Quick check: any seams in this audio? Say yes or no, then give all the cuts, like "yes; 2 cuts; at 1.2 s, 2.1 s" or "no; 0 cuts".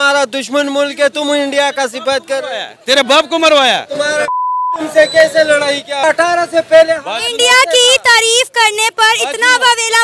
yes; 1 cut; at 5.9 s